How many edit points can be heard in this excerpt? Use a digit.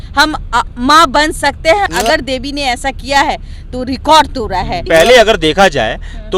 2